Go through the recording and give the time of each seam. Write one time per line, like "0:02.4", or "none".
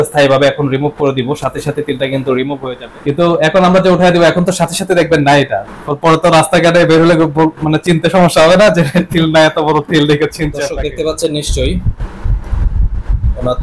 0:02.7
0:10.5